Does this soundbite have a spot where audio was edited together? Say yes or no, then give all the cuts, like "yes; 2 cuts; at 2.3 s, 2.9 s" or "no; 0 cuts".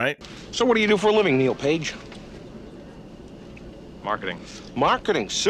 no; 0 cuts